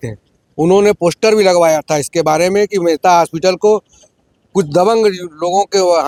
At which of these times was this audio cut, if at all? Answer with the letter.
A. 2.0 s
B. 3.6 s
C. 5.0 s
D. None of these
D